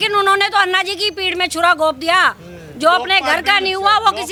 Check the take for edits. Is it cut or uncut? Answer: uncut